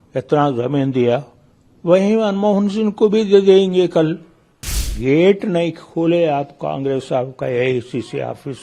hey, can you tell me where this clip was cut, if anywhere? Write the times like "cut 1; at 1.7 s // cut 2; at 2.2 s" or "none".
cut 1; at 4.8 s